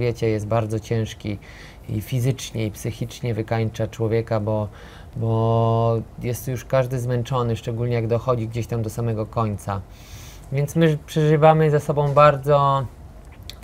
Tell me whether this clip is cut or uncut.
uncut